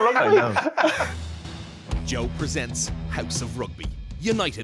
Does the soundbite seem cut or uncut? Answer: cut